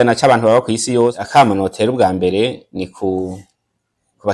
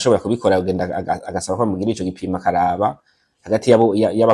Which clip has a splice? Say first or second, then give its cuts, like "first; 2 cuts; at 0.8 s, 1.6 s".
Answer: first; 1 cut; at 1.2 s